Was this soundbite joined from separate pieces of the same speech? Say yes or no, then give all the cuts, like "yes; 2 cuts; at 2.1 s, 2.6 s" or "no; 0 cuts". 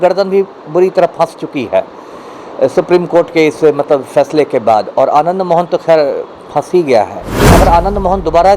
yes; 1 cut; at 7.4 s